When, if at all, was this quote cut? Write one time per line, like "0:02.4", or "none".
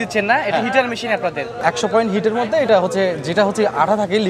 0:01.5